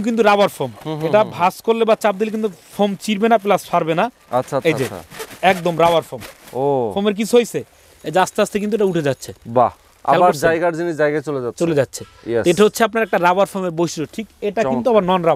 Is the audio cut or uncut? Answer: uncut